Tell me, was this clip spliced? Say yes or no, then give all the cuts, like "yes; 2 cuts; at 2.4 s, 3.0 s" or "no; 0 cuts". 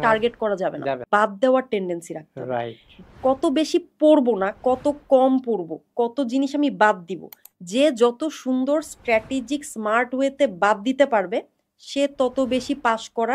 yes; 1 cut; at 1.0 s